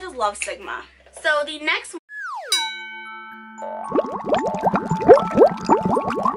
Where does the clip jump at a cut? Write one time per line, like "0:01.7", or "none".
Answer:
none